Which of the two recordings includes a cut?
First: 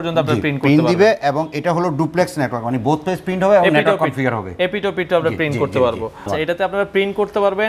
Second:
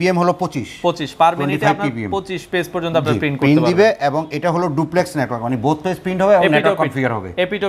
first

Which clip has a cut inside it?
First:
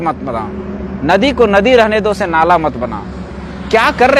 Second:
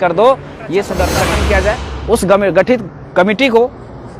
second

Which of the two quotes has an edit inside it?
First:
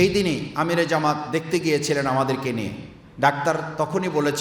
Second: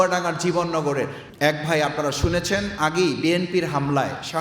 second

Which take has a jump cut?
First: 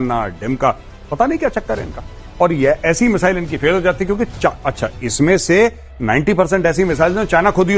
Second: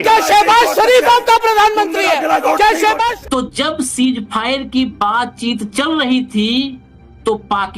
second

